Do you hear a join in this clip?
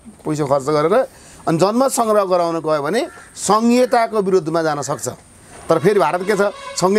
no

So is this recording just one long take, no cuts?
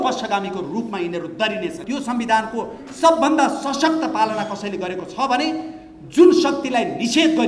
no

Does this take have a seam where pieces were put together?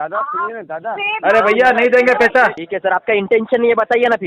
yes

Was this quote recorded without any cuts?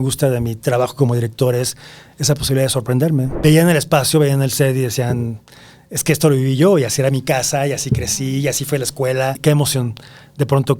no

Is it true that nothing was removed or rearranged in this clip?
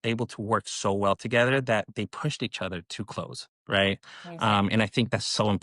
yes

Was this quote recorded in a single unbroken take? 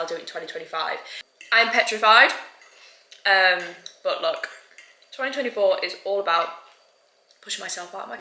no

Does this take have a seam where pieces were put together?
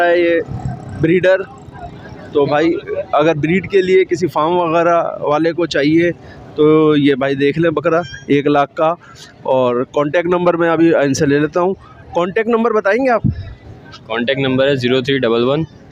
no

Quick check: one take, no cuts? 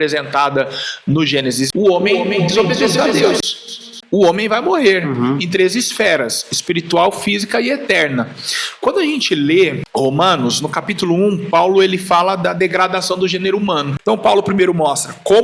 no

